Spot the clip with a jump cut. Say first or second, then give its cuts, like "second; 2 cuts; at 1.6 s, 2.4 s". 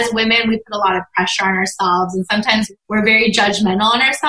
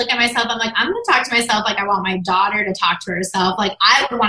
first; 1 cut; at 2.7 s